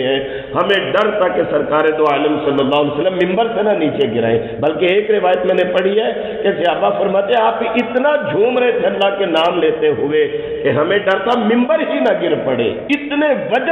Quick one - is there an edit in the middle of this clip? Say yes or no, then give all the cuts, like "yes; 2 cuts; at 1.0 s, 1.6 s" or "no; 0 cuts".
no; 0 cuts